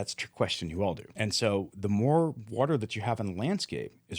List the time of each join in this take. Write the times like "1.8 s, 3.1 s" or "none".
1.1 s